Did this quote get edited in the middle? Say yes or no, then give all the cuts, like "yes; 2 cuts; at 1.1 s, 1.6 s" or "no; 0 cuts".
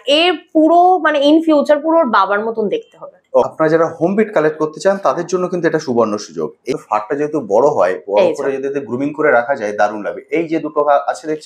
yes; 2 cuts; at 3.4 s, 6.7 s